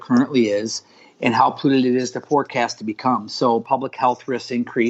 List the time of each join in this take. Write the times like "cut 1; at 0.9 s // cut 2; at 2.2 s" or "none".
cut 1; at 3.6 s